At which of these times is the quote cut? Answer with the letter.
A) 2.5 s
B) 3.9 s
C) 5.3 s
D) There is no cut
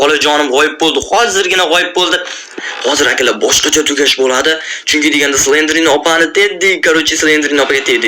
A